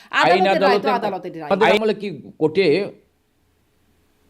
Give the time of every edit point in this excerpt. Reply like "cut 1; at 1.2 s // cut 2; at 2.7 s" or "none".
cut 1; at 1.6 s